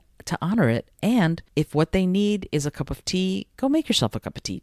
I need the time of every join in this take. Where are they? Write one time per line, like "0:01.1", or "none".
0:01.4

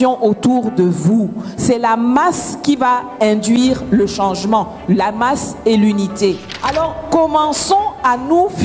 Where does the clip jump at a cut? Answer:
0:06.5

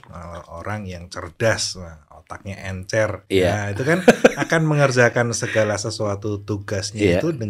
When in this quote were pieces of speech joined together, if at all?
none

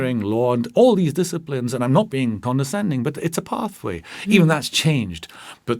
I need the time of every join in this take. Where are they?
0:02.4

